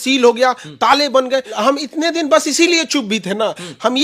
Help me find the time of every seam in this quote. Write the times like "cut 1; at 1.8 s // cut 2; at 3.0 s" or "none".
cut 1; at 1.6 s